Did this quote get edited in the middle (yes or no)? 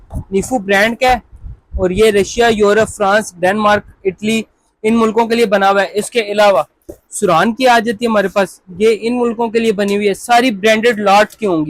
no